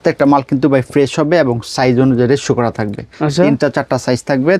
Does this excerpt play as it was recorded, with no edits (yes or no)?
yes